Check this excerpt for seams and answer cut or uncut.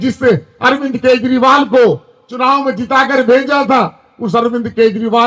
uncut